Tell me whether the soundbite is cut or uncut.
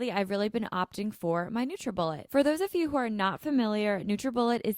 uncut